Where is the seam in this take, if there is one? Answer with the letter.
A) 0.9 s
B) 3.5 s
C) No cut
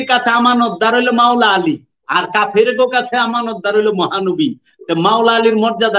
C